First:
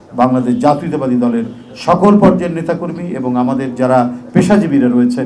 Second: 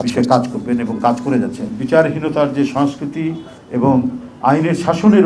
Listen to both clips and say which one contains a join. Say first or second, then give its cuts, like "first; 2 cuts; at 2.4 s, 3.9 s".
second; 1 cut; at 1.7 s